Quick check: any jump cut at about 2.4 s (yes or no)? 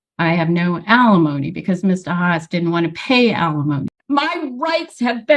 no